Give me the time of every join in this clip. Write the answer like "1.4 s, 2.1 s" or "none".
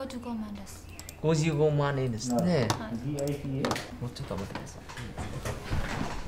3.9 s

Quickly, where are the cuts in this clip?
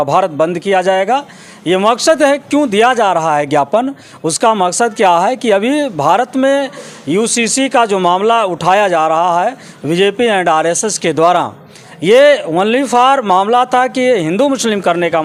none

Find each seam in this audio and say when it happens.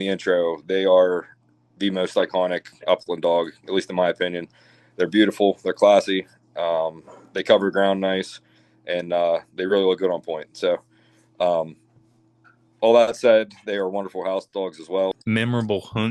15.2 s

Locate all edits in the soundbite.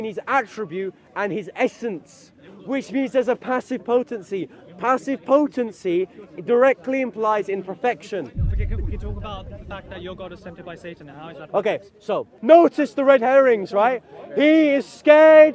12.3 s

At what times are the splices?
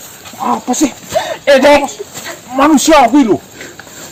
none

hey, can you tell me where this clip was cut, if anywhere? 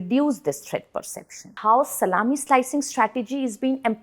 1.5 s

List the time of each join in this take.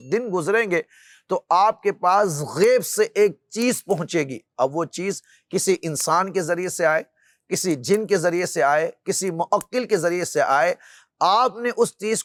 none

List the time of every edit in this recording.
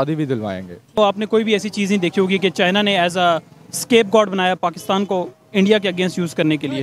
1.0 s

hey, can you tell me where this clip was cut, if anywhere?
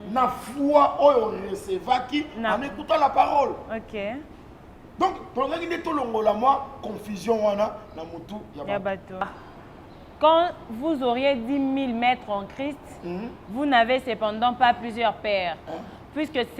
9.3 s

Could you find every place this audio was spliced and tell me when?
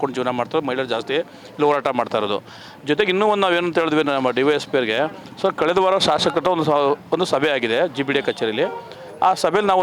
none

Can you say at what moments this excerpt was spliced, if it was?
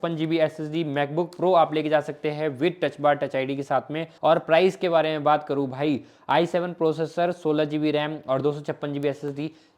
4.1 s

